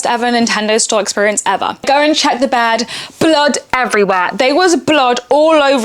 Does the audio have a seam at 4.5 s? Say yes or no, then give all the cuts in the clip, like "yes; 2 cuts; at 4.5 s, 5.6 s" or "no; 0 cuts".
no; 1 cut; at 1.8 s